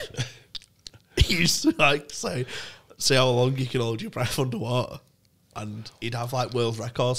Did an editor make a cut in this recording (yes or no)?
no